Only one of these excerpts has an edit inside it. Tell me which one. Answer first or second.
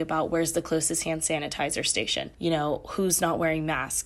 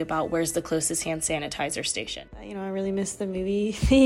second